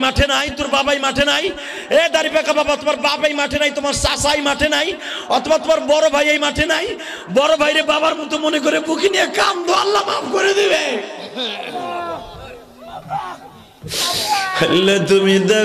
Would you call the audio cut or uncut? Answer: uncut